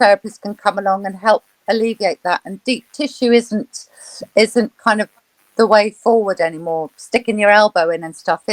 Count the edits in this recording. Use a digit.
0